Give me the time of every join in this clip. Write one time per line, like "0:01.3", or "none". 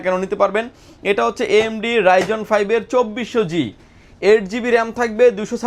none

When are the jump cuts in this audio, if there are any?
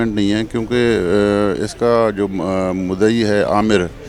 none

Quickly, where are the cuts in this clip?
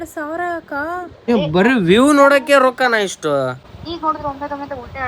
0:01.3
0:03.7

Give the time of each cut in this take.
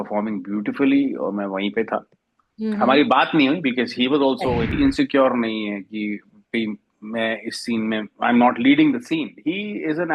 0:04.7

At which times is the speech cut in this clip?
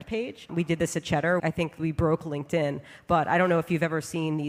0:01.6

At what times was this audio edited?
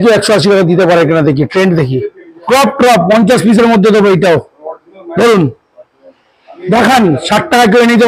0:02.4

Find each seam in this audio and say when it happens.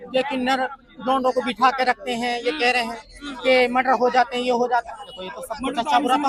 none

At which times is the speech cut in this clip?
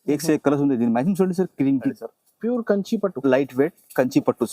0:01.9

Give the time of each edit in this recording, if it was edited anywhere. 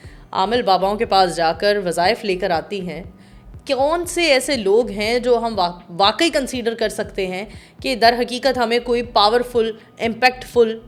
none

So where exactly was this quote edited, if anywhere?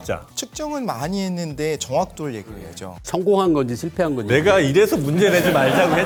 none

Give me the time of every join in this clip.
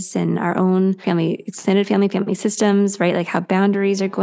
0:01.0

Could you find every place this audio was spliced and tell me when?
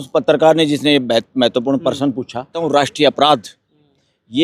0:02.6

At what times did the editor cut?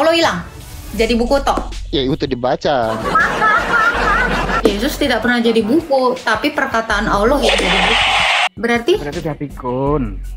0:04.6
0:08.5

